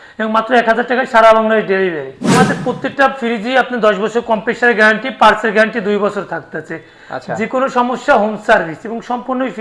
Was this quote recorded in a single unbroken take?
no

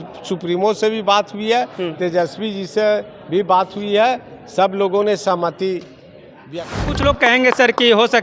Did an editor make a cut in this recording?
yes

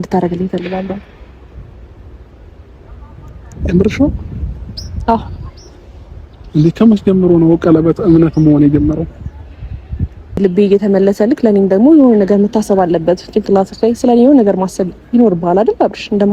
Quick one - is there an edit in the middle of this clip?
yes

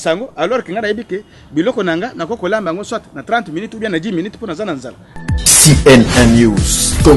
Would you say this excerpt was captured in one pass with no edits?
no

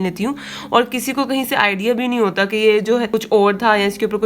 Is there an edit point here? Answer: yes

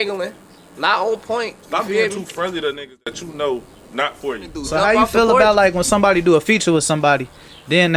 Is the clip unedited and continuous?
no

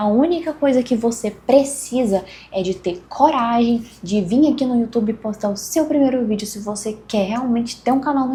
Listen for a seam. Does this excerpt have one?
no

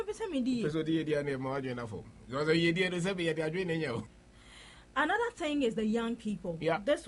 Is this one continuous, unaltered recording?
no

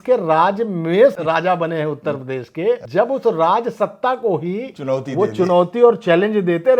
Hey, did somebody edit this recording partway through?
yes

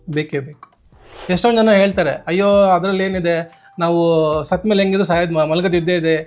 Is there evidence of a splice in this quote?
no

